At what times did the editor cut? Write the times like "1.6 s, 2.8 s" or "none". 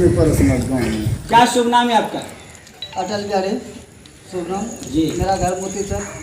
1.1 s